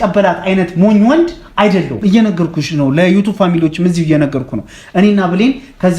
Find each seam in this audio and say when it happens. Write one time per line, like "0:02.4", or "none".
0:01.9

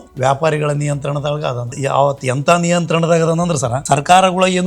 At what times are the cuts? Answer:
0:01.7
0:03.8

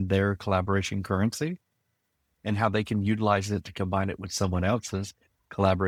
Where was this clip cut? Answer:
none

